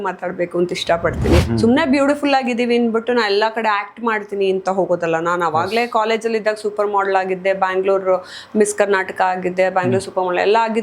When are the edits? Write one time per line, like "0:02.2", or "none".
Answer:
0:01.5

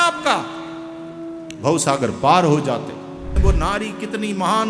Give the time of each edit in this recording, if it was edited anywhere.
0:03.4

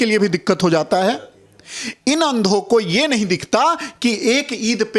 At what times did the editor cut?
none

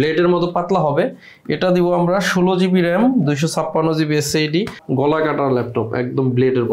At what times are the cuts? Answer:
0:04.8

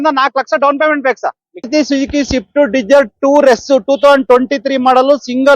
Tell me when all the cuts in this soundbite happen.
0:01.7

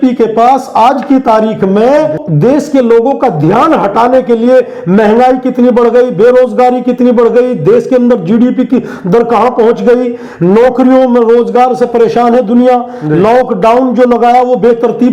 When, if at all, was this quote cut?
none

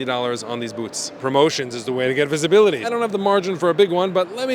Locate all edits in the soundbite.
0:01.1
0:02.8

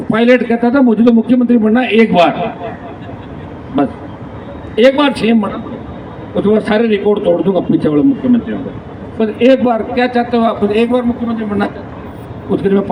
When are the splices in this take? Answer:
none

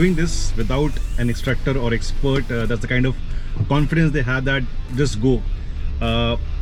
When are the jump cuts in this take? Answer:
none

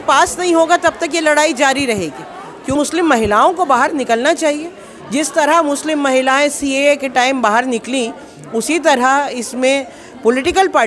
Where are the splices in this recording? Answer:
0:02.8

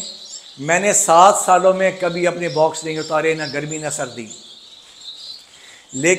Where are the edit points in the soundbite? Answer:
none

